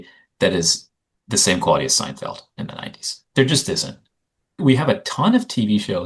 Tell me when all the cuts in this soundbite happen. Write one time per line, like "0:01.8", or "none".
none